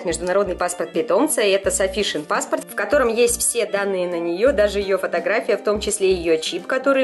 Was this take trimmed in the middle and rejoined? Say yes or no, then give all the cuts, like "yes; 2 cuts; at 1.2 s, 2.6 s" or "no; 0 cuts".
no; 0 cuts